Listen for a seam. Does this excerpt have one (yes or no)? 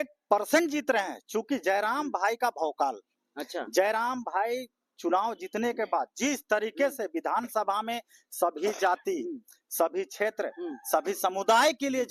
no